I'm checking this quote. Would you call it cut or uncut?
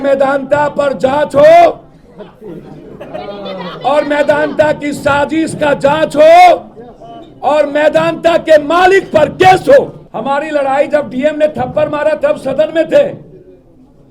cut